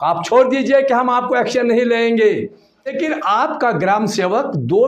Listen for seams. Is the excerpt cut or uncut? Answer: cut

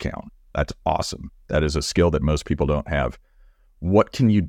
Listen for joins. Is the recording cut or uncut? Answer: uncut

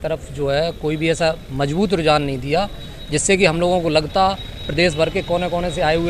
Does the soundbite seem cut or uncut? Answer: uncut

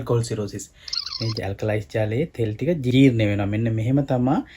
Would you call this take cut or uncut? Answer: cut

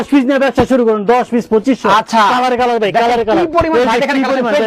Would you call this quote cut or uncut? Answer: uncut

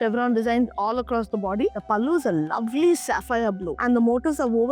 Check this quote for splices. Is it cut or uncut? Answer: cut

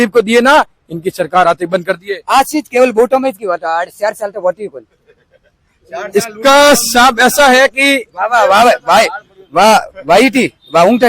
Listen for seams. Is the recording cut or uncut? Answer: uncut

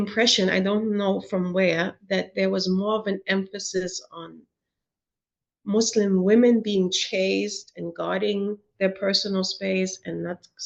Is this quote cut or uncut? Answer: uncut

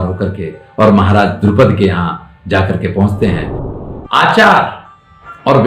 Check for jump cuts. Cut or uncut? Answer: cut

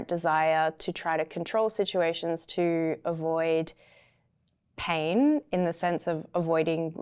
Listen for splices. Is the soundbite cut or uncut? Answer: uncut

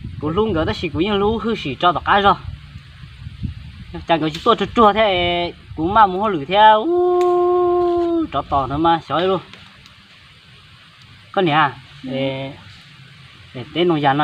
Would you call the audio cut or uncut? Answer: uncut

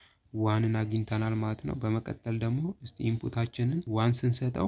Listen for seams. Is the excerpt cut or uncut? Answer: uncut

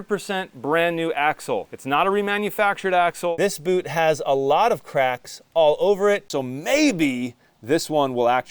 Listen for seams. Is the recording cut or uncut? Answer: cut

